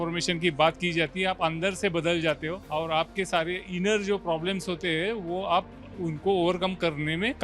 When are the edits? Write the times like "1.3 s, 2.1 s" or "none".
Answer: none